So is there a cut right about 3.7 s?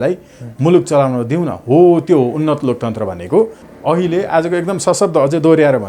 yes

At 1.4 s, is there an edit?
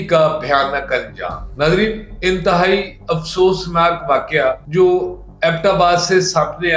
no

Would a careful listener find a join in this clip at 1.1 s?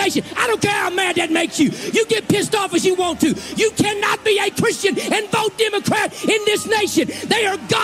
no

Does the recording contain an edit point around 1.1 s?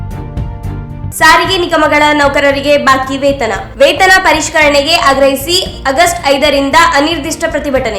yes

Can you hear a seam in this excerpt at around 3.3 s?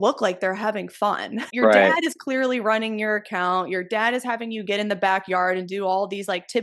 no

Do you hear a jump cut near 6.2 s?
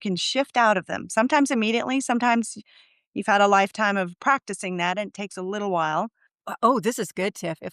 yes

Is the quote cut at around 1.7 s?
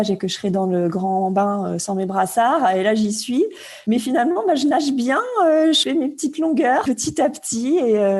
no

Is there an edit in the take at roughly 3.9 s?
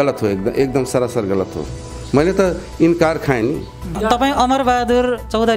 yes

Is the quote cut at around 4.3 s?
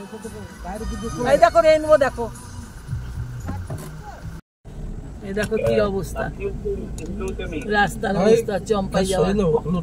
yes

